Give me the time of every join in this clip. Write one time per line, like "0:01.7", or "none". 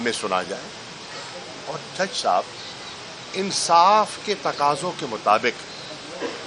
none